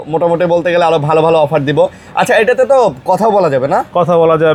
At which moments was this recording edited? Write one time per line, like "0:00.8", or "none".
none